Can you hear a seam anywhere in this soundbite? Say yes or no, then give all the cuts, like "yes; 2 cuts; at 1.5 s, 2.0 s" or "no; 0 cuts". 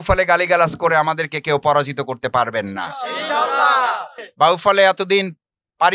yes; 1 cut; at 4.2 s